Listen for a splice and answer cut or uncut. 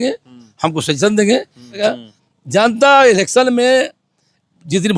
cut